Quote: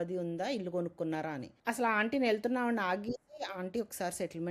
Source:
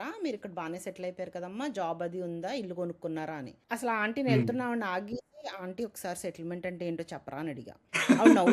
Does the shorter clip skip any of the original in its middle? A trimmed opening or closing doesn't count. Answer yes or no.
no